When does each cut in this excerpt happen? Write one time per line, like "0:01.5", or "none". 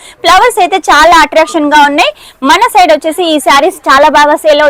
none